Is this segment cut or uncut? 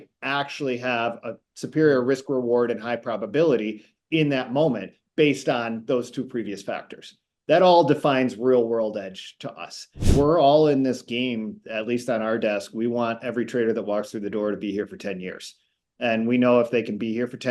cut